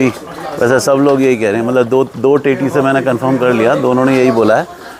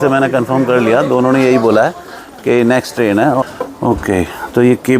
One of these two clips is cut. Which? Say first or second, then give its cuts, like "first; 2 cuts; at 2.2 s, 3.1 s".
second; 1 cut; at 3.4 s